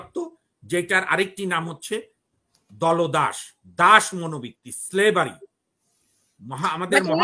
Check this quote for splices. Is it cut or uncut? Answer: uncut